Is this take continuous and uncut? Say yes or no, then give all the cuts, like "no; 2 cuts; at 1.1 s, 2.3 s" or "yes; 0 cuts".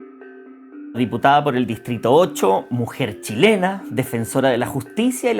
no; 1 cut; at 0.9 s